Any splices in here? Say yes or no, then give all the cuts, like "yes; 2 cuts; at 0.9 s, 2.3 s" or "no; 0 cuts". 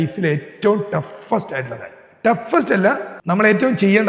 yes; 1 cut; at 3.1 s